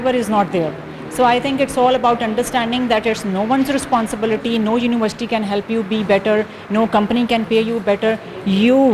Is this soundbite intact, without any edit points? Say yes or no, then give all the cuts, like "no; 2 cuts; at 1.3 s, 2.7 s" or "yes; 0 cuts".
yes; 0 cuts